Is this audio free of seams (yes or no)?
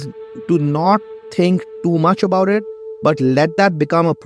yes